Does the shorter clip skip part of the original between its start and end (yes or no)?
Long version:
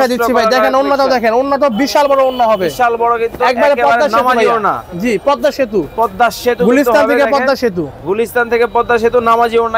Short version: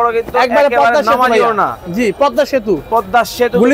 no